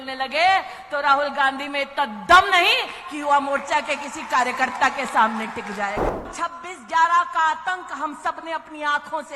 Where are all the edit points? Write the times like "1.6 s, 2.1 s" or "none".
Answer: 6.3 s